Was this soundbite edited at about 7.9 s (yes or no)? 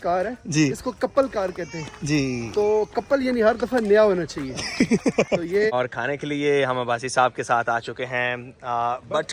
no